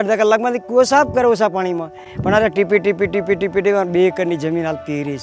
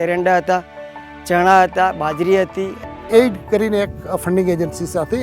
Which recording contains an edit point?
second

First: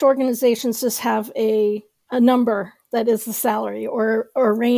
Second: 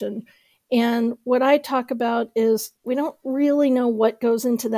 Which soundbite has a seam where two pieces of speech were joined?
second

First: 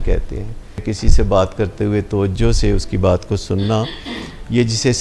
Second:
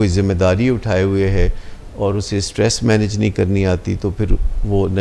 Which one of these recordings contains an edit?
first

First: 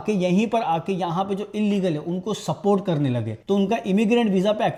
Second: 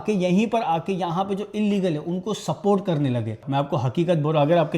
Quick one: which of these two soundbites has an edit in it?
second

